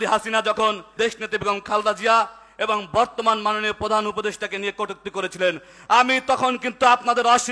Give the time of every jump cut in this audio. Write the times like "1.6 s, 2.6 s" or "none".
0.9 s